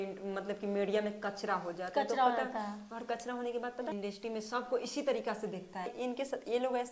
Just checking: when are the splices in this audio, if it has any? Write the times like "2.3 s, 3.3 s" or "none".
3.9 s, 5.9 s